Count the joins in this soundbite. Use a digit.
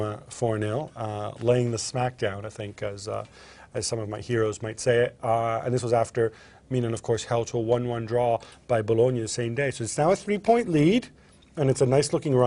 0